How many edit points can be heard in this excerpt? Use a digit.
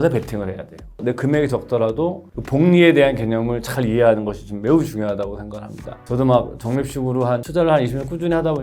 3